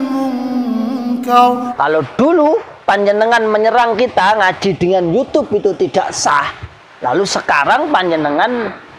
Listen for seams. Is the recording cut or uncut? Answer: cut